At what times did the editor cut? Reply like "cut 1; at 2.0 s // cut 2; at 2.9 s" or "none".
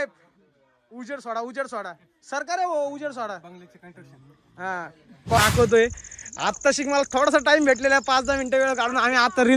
cut 1; at 5.4 s